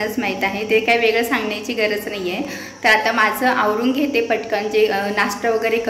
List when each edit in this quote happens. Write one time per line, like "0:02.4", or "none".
none